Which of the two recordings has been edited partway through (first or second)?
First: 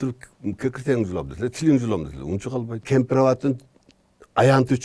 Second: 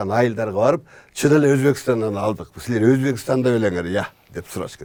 first